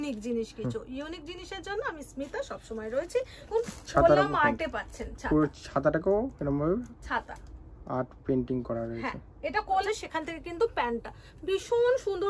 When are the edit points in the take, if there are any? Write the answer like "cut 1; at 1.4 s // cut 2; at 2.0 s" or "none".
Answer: cut 1; at 3.5 s // cut 2; at 9.8 s